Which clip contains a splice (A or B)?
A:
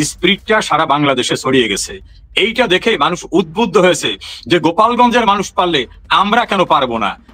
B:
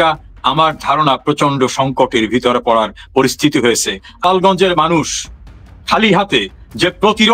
B